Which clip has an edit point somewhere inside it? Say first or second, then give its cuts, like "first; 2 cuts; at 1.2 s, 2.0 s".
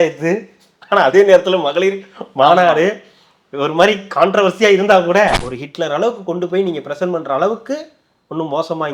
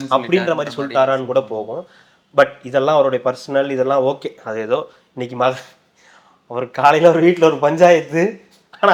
first; 1 cut; at 5.5 s